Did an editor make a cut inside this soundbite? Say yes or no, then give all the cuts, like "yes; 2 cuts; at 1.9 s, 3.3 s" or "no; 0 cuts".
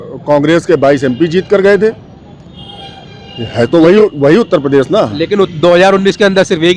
no; 0 cuts